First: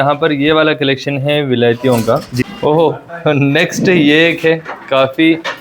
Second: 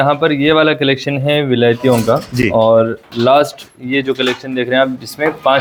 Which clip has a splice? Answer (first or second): first